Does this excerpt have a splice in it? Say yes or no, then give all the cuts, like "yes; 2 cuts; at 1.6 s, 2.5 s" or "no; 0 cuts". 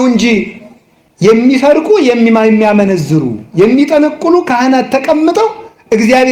no; 0 cuts